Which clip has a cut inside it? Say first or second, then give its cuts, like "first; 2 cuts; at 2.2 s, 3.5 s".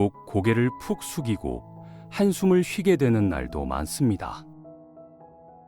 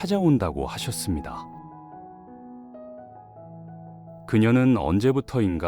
first; 1 cut; at 4.5 s